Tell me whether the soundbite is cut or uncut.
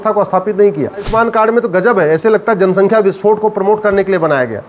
cut